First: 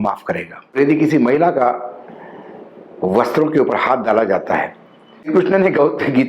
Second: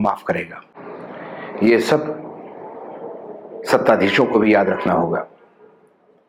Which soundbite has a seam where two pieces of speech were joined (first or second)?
first